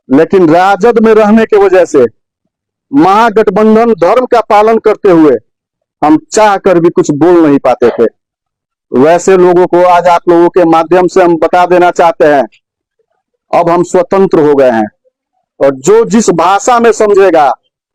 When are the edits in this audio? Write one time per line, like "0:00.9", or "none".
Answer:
none